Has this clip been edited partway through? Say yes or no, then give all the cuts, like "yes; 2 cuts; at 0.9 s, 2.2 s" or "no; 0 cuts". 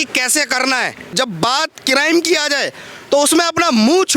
yes; 1 cut; at 1.2 s